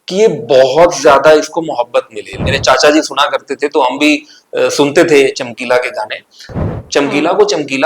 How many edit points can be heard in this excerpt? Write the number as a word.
two